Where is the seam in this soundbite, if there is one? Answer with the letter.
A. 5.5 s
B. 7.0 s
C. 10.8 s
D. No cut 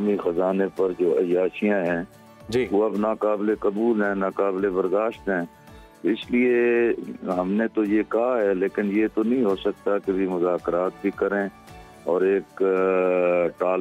D